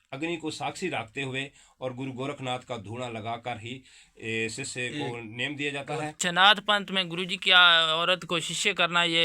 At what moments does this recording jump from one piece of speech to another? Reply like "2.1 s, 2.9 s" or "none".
6.2 s